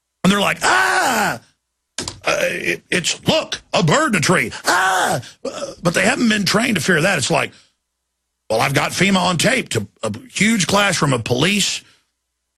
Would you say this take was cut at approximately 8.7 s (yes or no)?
no